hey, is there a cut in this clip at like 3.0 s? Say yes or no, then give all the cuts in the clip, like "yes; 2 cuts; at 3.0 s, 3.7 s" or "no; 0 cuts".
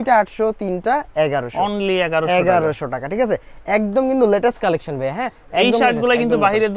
no; 0 cuts